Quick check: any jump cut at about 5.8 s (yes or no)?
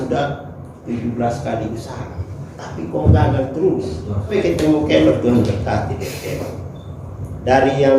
no